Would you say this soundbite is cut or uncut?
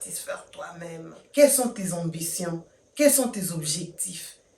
cut